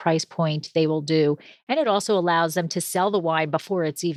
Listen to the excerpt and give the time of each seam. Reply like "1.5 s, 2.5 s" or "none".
none

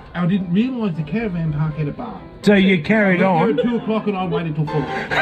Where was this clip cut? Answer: 2.4 s

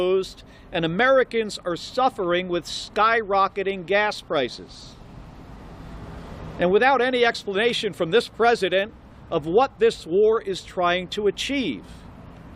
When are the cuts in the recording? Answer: none

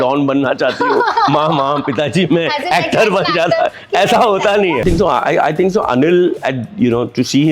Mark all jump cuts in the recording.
4.8 s

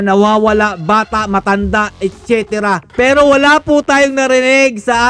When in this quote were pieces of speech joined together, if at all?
2.9 s

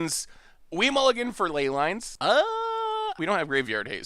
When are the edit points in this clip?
2.1 s, 3.1 s

